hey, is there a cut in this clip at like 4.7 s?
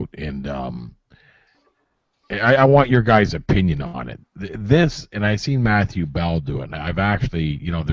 no; 0 cuts

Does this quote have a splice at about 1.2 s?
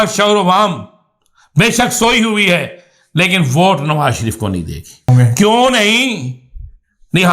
no; 1 cut; at 5.1 s

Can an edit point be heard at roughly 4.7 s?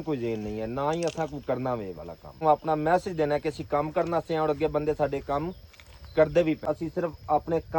no; 2 cuts; at 2.4 s, 6.6 s

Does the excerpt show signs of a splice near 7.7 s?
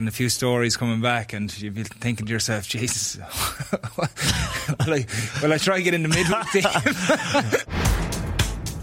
yes; 1 cut; at 7.7 s

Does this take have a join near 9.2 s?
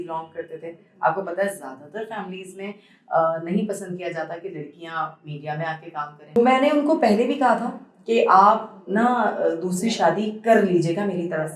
no; 1 cut; at 6.3 s

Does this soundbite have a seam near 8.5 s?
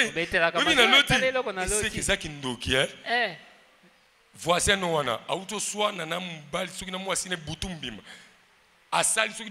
no; 0 cuts

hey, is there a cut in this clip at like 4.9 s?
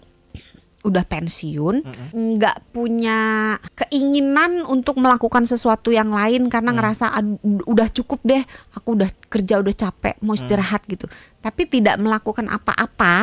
no; 2 cuts; at 2.0 s, 3.7 s

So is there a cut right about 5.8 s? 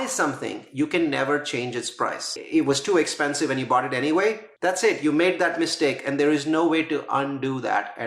no; 2 cuts; at 2.4 s, 4.5 s

